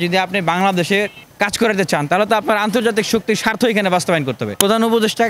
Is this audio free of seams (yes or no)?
no